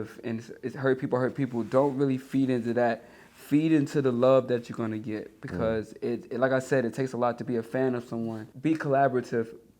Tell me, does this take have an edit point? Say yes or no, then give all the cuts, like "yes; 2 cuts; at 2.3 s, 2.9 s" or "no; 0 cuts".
yes; 1 cut; at 8.4 s